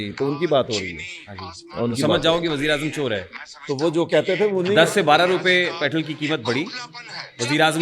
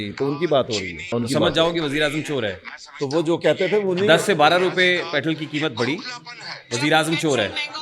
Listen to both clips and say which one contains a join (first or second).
second